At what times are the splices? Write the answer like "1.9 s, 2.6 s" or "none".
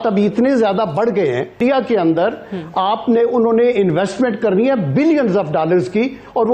1.6 s